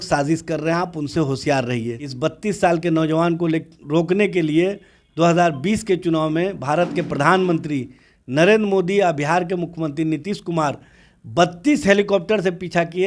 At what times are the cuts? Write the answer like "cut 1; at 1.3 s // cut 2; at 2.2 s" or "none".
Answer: cut 1; at 2.0 s